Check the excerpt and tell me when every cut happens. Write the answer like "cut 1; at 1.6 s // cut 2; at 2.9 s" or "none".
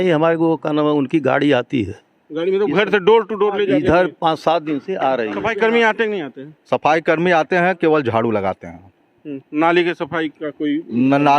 cut 1; at 5.5 s